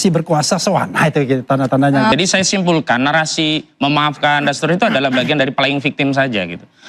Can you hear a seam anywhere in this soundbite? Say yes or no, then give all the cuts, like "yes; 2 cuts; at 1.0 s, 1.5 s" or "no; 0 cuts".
yes; 1 cut; at 2.1 s